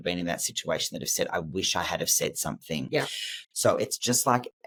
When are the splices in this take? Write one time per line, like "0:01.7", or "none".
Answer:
none